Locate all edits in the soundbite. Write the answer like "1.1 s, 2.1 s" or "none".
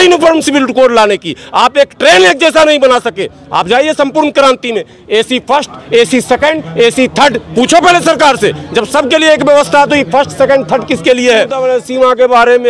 11.6 s